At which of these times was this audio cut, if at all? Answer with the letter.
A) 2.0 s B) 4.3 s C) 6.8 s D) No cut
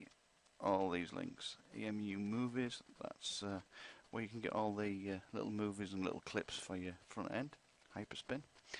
C